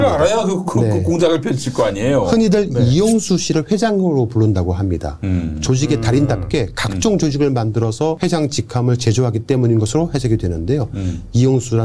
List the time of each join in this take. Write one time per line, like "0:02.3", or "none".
0:08.2